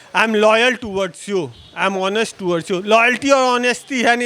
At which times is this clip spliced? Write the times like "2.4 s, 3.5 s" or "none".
none